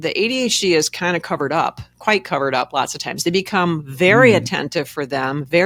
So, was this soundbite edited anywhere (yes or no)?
no